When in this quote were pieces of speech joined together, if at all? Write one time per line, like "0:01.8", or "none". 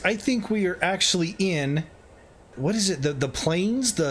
0:02.5

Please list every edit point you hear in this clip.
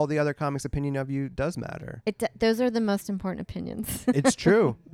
none

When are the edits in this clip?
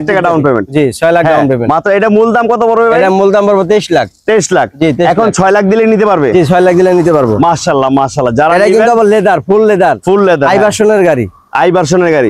none

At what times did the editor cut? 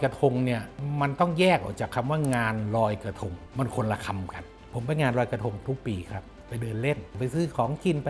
0:03.3
0:04.6
0:07.1

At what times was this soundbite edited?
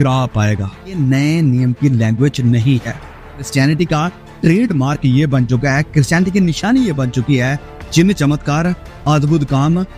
0:01.0
0:03.5

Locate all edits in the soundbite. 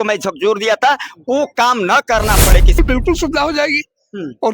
0:02.8

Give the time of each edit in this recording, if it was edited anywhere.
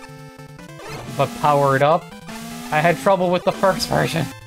0:01.1

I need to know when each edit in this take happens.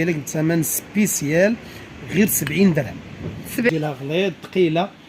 0:03.7

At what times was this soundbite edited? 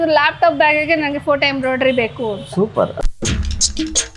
0:02.9

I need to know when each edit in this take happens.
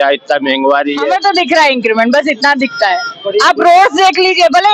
0:01.1

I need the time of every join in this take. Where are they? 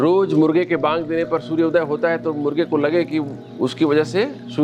none

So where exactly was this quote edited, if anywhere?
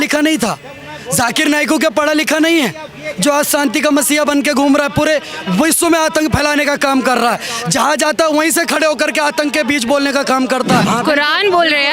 0:10.9

